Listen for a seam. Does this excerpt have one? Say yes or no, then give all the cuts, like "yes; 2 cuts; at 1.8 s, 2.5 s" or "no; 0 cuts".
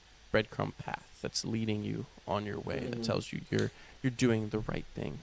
no; 0 cuts